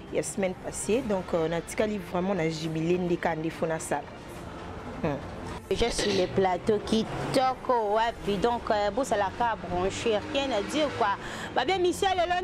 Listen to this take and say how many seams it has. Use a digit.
1